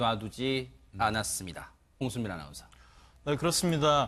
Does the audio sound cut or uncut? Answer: uncut